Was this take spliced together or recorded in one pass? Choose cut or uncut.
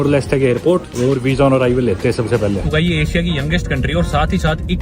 cut